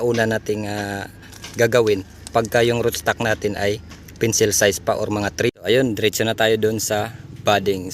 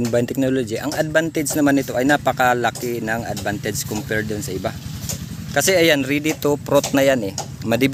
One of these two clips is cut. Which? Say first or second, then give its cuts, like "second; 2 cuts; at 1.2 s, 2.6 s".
first; 1 cut; at 5.5 s